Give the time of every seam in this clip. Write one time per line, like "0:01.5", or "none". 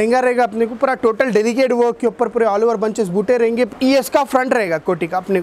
0:03.7

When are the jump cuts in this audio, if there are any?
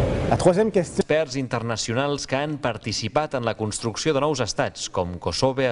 none

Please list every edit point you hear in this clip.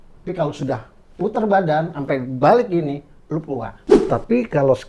0:03.9

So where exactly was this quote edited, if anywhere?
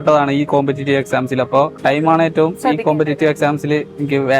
0:01.7

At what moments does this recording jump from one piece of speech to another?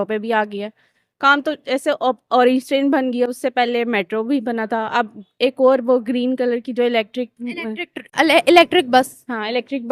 none

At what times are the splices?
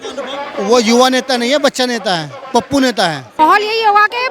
0:03.4

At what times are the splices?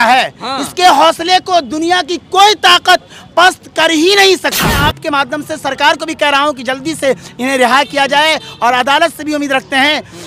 0:04.8

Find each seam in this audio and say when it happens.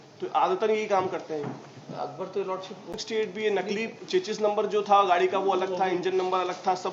0:03.0

